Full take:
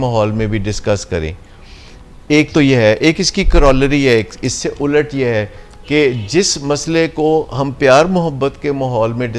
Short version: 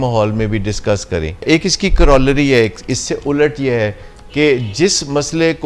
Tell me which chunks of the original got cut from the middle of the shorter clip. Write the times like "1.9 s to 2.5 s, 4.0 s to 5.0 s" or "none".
1.4 s to 3.0 s